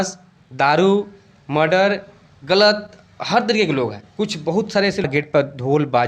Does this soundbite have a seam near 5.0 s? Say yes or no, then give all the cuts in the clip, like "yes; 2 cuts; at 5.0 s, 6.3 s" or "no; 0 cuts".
yes; 1 cut; at 5.0 s